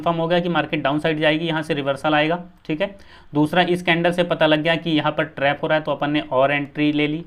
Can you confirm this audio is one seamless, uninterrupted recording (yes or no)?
yes